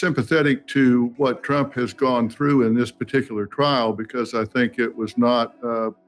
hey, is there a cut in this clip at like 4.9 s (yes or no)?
no